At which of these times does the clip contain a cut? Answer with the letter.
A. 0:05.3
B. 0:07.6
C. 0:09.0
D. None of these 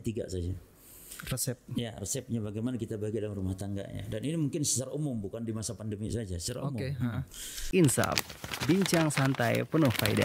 B